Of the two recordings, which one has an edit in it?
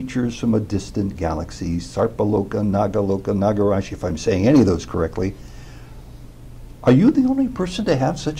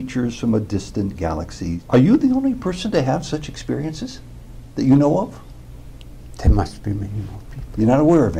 second; 1 cut; at 1.8 s

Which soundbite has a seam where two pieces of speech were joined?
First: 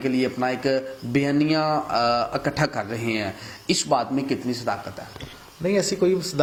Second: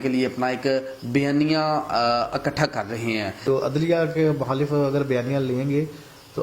second; 1 cut; at 3.7 s

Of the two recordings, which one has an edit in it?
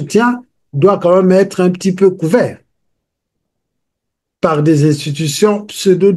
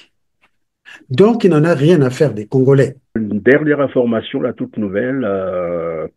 second; 1 cut; at 3.0 s

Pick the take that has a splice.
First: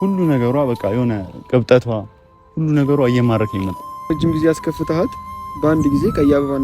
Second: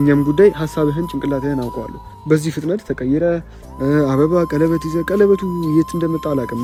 first; 1 cut; at 4.1 s

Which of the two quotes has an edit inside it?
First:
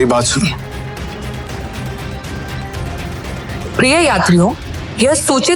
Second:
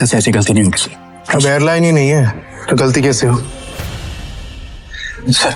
first; 1 cut; at 1.5 s

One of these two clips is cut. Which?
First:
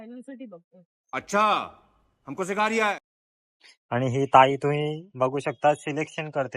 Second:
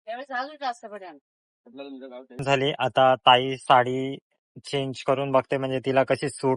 second; 1 cut; at 2.4 s

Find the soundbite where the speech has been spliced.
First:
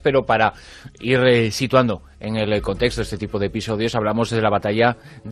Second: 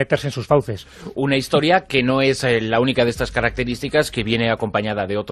second; 1 cut; at 3.2 s

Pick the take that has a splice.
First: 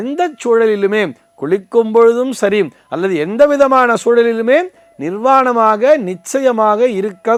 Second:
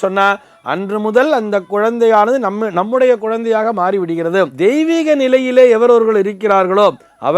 second; 1 cut; at 4.5 s

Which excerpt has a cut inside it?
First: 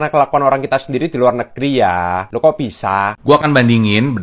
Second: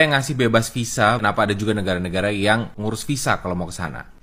first; 1 cut; at 3.3 s

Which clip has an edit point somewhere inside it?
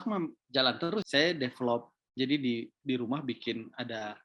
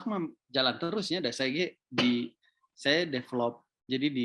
first; 1 cut; at 1.1 s

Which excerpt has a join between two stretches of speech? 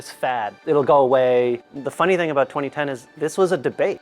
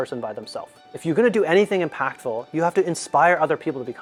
first; 1 cut; at 1.6 s

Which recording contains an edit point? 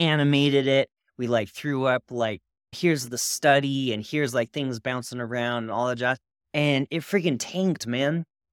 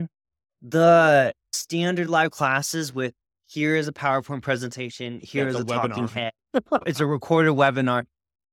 second; 2 cuts; at 1.5 s, 6.8 s

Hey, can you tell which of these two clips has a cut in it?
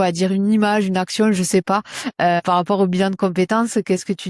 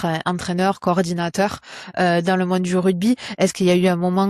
first; 1 cut; at 2.4 s

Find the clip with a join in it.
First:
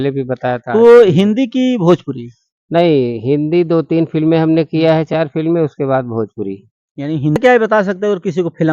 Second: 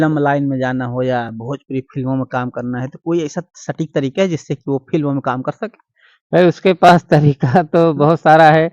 first; 1 cut; at 7.4 s

